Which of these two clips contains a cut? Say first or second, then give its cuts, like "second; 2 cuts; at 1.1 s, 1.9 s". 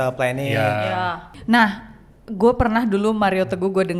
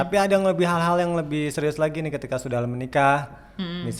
first; 1 cut; at 1.3 s